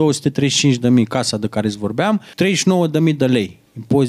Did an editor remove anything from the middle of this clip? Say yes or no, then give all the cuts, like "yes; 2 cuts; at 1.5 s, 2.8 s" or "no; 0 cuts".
yes; 1 cut; at 2.3 s